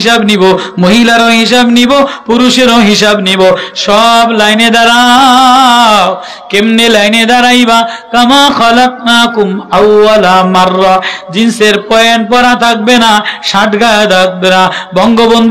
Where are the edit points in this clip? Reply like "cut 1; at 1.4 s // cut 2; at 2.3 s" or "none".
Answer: none